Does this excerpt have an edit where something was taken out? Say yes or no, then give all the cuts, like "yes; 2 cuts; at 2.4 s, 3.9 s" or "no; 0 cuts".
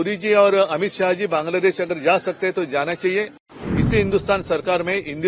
yes; 1 cut; at 3.4 s